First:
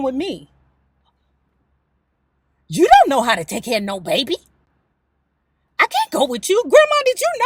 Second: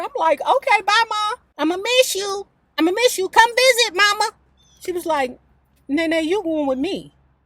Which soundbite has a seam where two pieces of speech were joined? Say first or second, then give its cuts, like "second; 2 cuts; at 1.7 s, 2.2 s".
second; 2 cuts; at 1.5 s, 4.5 s